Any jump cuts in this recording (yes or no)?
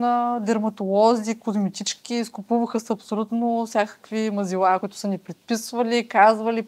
yes